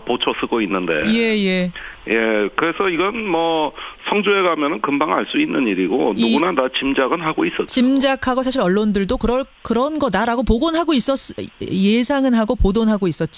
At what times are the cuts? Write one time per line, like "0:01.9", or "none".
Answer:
none